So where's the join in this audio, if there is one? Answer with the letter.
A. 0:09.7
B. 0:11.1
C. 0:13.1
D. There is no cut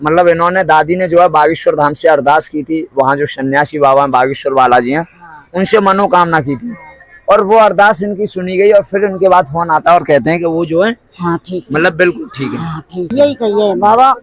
C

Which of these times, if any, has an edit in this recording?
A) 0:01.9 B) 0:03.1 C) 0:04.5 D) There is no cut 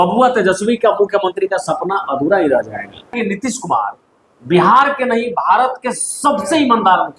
B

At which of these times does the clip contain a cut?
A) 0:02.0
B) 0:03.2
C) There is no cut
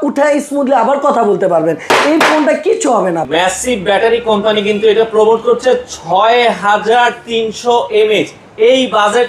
B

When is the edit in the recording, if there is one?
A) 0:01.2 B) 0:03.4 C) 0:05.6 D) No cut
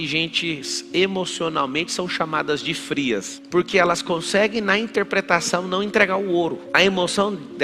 B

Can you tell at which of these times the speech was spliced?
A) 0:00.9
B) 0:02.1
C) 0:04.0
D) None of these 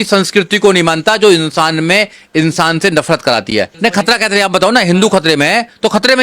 C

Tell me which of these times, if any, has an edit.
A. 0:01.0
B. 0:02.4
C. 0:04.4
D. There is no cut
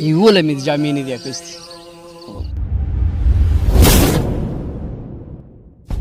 D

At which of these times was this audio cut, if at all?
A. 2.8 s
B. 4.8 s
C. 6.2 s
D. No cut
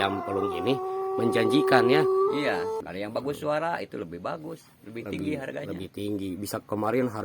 A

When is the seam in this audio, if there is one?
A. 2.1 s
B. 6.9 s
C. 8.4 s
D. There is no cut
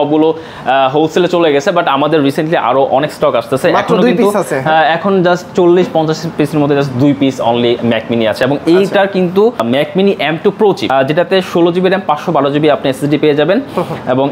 D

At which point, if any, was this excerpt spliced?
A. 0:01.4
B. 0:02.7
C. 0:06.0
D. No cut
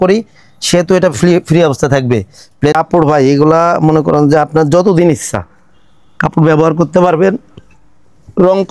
B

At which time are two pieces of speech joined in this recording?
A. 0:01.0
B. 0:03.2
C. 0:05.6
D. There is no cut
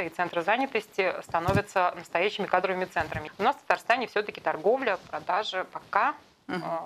B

